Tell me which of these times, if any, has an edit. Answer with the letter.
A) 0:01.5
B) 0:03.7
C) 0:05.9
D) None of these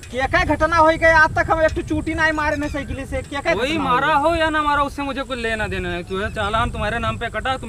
D